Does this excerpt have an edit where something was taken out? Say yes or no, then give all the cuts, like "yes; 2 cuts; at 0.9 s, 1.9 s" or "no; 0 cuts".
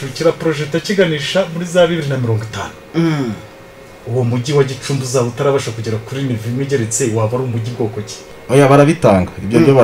yes; 1 cut; at 8.3 s